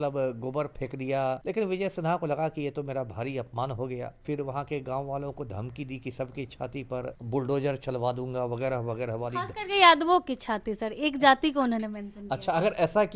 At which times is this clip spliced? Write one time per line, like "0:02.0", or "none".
0:01.4
0:04.2
0:07.2